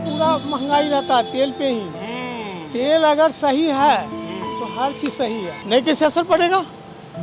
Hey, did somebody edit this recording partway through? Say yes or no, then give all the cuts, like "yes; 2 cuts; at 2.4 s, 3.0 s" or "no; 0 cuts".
yes; 1 cut; at 5.6 s